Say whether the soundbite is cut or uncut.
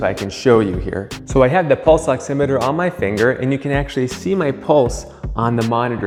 uncut